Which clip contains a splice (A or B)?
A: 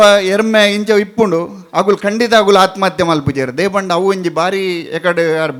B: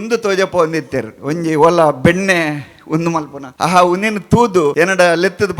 B